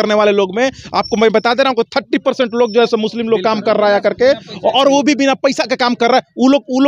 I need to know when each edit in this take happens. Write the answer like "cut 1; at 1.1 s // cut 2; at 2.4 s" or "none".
none